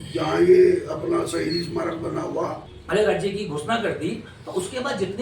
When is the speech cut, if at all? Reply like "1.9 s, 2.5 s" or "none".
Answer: 2.7 s